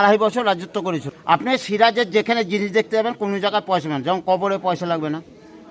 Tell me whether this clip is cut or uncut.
cut